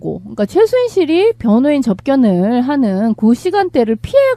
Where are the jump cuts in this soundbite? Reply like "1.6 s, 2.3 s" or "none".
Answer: none